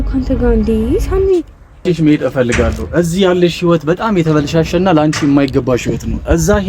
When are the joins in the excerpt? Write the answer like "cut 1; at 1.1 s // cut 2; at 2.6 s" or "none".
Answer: cut 1; at 1.8 s